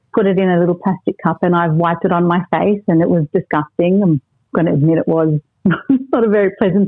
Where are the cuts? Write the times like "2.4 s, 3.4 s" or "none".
none